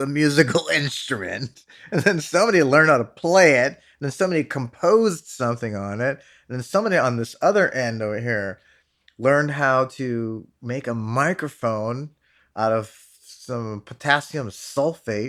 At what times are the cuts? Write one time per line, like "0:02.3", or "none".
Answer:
none